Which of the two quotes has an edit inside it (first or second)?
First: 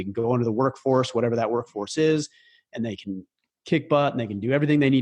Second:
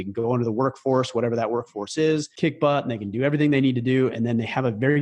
second